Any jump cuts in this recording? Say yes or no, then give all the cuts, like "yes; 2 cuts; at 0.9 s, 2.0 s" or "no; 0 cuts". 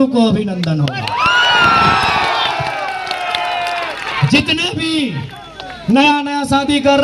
no; 0 cuts